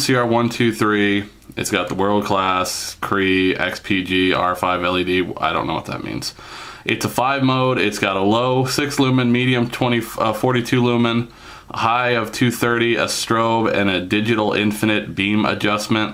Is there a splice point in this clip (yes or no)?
no